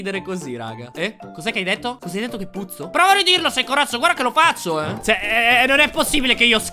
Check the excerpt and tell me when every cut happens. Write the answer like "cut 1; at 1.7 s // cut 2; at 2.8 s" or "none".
cut 1; at 0.9 s // cut 2; at 2.8 s // cut 3; at 4.9 s